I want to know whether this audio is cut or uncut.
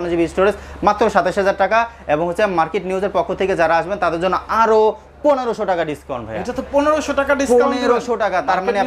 uncut